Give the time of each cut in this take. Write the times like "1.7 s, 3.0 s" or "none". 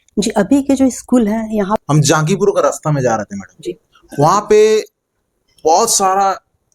1.8 s